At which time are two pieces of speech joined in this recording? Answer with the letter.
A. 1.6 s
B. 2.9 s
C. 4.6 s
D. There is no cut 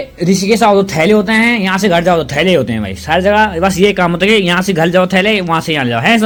D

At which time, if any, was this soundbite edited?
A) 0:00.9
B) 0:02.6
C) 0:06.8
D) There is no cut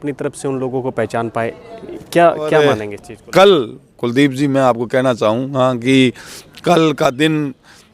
B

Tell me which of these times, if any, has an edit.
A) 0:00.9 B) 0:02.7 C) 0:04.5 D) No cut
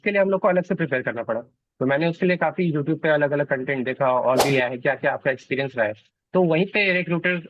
C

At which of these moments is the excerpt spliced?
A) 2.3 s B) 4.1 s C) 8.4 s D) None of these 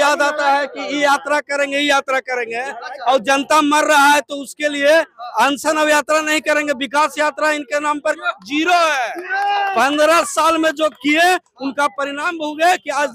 D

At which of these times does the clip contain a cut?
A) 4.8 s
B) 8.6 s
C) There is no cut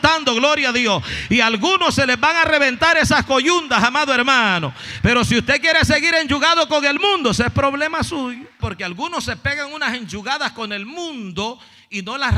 B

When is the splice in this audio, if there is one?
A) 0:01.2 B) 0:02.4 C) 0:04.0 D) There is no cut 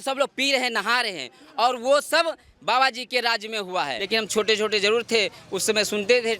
C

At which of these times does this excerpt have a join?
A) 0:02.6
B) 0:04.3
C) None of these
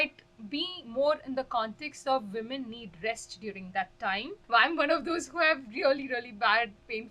B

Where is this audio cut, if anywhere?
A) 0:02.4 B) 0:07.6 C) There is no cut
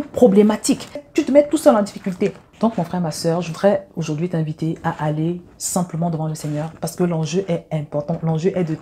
C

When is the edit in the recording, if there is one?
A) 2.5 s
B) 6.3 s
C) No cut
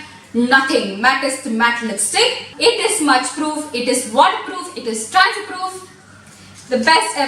A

